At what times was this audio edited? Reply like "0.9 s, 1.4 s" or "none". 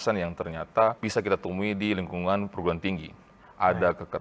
1.0 s